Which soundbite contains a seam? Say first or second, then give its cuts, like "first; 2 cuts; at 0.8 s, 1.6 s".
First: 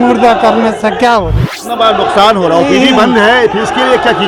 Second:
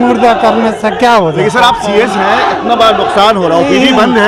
first; 1 cut; at 1.5 s